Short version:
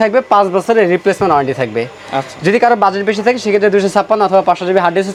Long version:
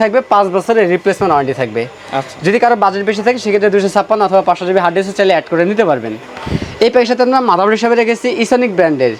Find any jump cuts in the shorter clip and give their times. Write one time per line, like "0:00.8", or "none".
none